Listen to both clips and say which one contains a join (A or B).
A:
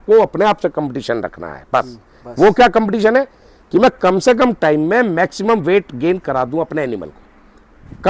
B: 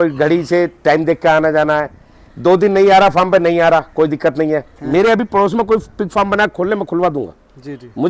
B